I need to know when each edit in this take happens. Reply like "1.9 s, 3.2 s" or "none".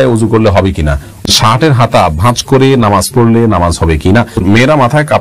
1.3 s, 4.4 s